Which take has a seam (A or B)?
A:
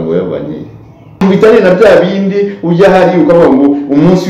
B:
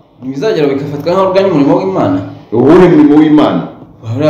A